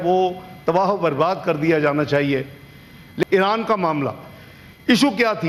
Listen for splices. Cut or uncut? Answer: cut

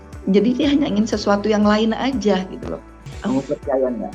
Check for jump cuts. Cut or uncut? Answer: cut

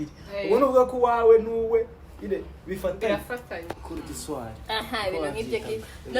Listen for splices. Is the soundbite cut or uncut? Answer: cut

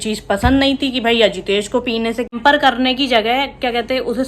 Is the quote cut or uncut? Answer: cut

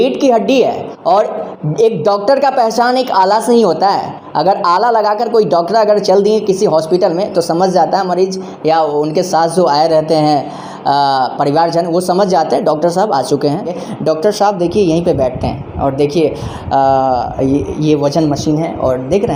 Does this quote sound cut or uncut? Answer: uncut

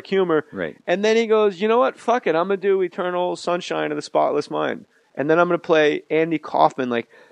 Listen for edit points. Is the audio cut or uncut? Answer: uncut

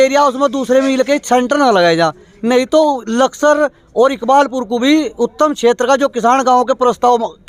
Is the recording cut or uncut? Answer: uncut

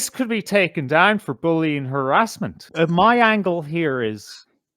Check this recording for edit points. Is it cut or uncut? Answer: cut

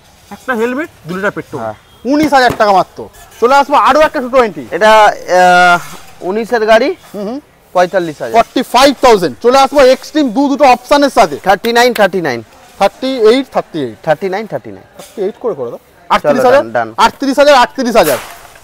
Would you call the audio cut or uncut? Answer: uncut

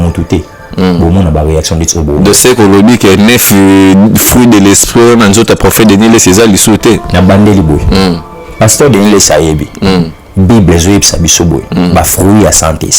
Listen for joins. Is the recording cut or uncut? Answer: uncut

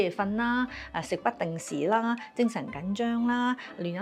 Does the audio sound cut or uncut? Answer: uncut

